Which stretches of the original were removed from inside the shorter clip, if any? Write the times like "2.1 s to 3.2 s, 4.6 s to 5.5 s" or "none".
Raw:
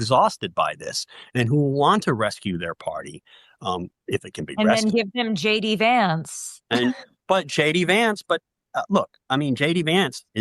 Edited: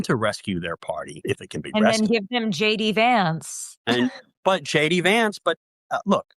3.1 s to 4.0 s